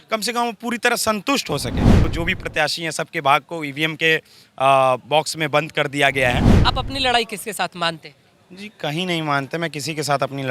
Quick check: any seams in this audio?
yes; 2 cuts; at 2.0 s, 6.5 s

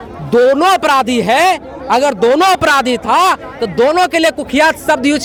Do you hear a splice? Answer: no; 0 cuts

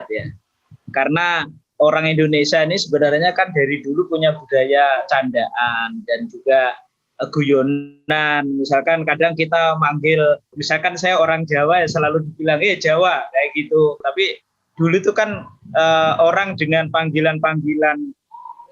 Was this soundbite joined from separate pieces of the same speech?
yes; 2 cuts; at 10.6 s, 14.0 s

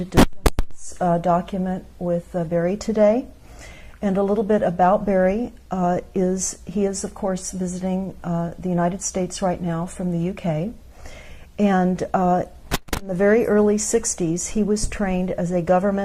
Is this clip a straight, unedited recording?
yes; 0 cuts

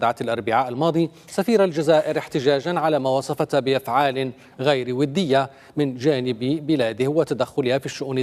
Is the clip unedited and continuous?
yes; 0 cuts

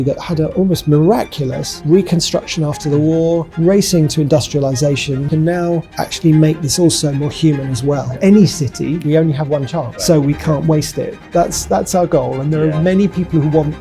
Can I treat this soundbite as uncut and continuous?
no; 5 cuts; at 5.3 s, 8.1 s, 9.0 s, 9.9 s, 11.2 s

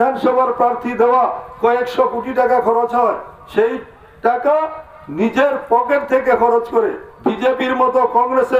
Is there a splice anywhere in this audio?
no; 0 cuts

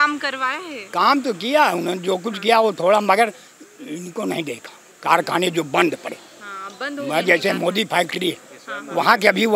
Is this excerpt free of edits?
yes; 0 cuts

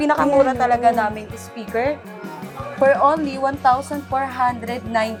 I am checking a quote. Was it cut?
no; 0 cuts

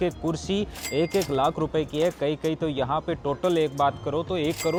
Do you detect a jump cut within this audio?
no; 0 cuts

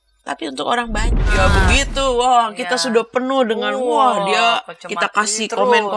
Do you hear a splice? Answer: yes; 1 cut; at 1.3 s

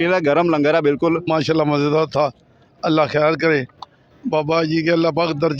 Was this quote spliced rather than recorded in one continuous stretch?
no; 0 cuts

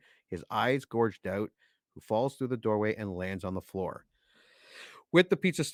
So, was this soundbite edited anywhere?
no; 0 cuts

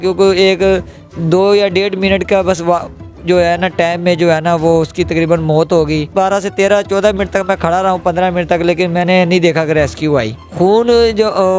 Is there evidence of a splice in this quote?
yes; 2 cuts; at 6.0 s, 10.4 s

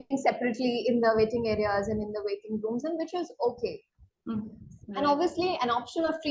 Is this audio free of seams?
no; 1 cut; at 4.6 s

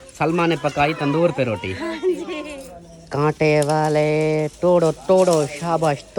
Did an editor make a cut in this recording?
yes; 1 cut; at 2.6 s

